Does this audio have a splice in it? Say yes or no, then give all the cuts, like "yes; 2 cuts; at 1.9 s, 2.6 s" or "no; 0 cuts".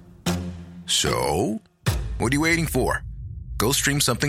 no; 0 cuts